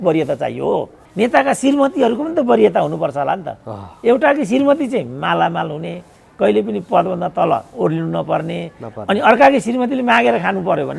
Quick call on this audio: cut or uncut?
cut